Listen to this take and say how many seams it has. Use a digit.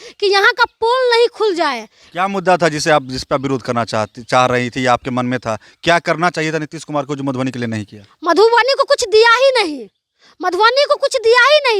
0